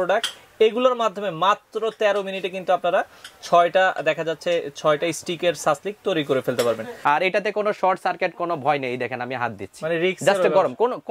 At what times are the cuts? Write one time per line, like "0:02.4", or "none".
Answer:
0:06.9